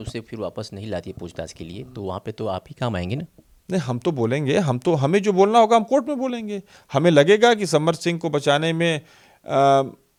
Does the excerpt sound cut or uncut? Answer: uncut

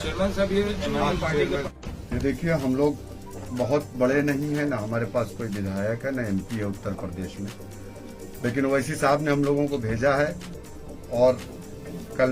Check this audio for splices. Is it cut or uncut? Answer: cut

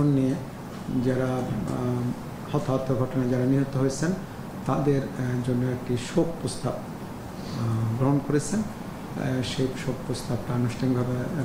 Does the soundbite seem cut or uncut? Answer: uncut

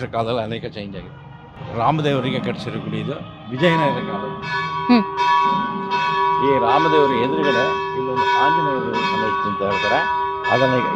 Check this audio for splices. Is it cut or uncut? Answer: uncut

